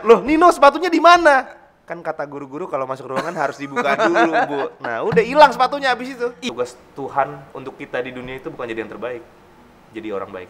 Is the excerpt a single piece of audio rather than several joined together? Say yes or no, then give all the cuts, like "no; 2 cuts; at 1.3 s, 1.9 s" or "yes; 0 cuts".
no; 1 cut; at 6.4 s